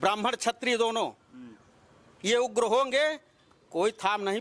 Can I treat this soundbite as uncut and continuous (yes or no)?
yes